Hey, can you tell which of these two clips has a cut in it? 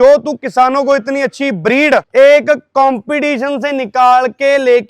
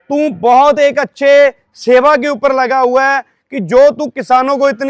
first; 1 cut; at 2.1 s

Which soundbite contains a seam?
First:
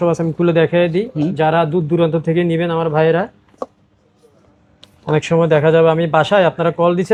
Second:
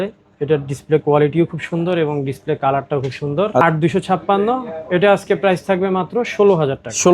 second; 1 cut; at 3.6 s

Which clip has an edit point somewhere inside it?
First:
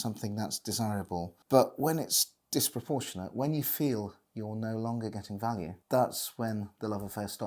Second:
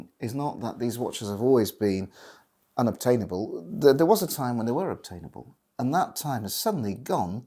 first; 2 cuts; at 1.4 s, 5.8 s

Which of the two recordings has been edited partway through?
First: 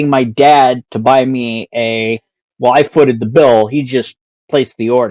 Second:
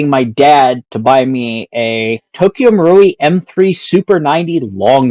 second; 1 cut; at 2.2 s

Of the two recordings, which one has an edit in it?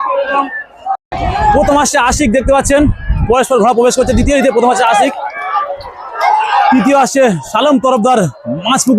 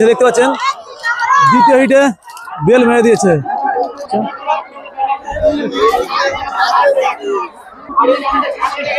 first; 1 cut; at 1.0 s

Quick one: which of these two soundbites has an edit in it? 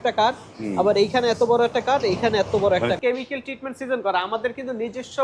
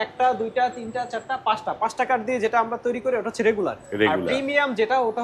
first; 1 cut; at 3.0 s

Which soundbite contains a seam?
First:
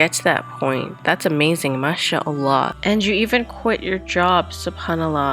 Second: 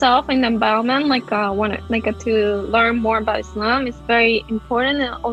first; 1 cut; at 2.8 s

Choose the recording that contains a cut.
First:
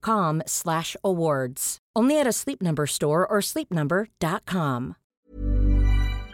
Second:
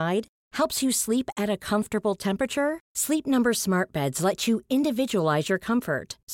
first; 1 cut; at 5.1 s

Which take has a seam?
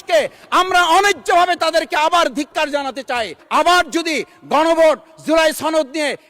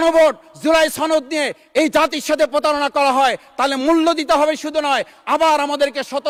first; 1 cut; at 3.4 s

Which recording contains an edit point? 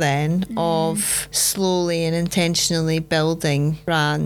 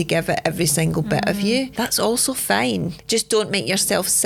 second; 1 cut; at 1.7 s

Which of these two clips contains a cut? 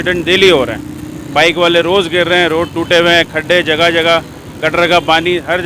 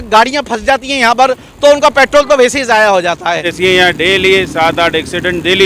second; 1 cut; at 3.5 s

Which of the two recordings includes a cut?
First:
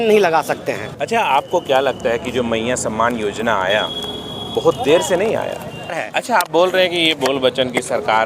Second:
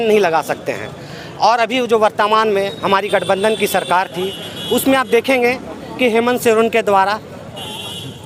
first; 2 cuts; at 0.9 s, 6.0 s

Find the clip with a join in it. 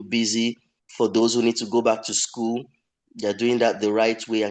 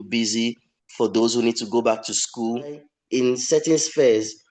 second; 1 cut; at 2.9 s

